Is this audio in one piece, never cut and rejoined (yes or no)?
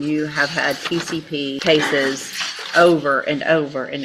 no